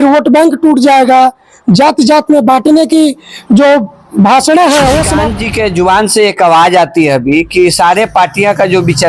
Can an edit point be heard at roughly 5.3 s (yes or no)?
yes